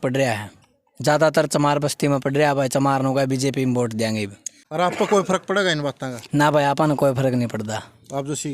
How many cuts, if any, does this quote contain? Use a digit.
1